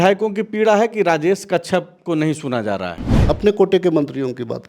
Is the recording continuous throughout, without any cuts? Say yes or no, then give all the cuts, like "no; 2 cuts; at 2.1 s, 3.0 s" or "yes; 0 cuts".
no; 1 cut; at 3.1 s